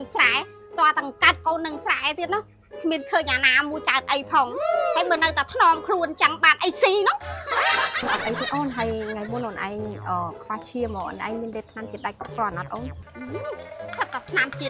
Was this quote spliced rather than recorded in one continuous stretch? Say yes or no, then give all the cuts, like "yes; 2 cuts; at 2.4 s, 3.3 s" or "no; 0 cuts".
yes; 1 cut; at 8.0 s